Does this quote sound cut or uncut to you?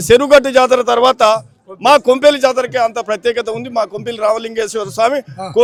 uncut